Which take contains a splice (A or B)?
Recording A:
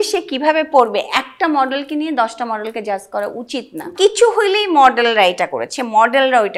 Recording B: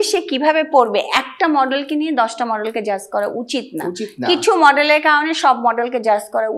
A